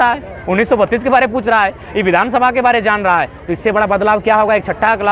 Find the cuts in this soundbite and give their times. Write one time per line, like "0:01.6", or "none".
none